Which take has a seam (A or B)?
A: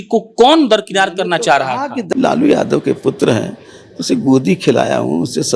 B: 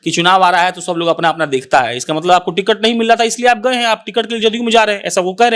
A